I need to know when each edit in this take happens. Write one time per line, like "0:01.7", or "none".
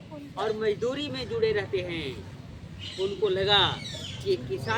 none